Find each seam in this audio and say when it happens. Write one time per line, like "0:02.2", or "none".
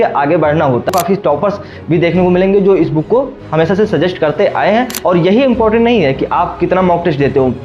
0:00.9
0:04.9